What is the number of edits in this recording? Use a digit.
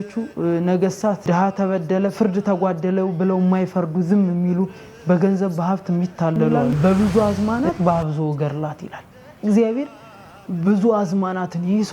1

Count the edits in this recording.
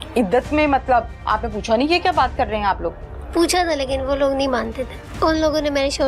1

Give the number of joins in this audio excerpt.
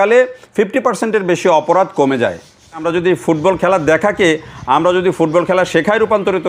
1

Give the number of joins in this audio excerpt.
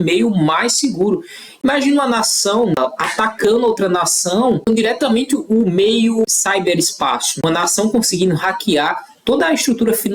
2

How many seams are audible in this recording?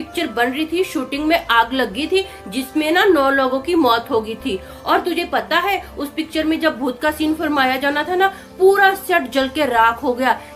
0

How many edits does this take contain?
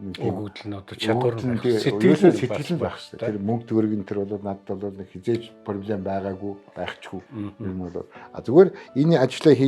1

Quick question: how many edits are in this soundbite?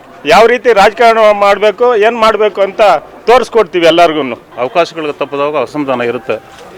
2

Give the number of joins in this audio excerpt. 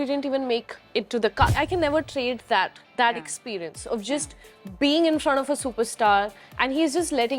1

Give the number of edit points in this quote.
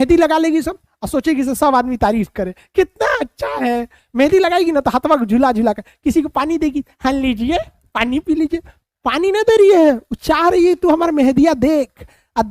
0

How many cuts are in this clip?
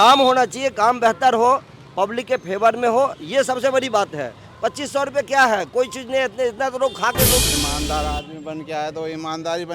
1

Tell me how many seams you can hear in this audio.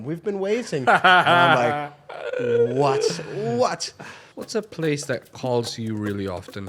1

